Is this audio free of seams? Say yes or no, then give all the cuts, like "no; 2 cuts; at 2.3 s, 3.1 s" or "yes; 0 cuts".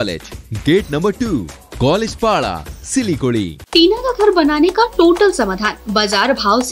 no; 1 cut; at 3.6 s